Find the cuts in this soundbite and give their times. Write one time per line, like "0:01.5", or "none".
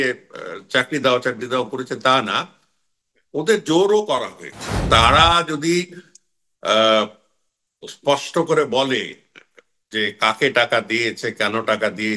0:04.8